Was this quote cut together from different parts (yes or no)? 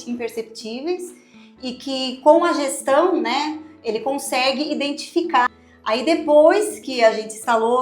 yes